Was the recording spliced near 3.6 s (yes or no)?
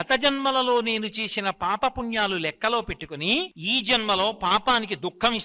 yes